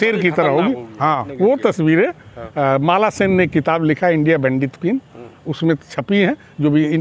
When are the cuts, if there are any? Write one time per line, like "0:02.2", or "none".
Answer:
0:01.3